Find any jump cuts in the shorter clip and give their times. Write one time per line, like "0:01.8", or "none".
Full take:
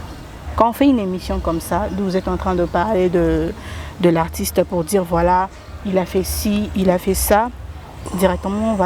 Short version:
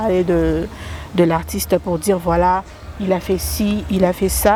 none